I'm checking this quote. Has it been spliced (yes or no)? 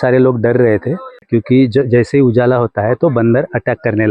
yes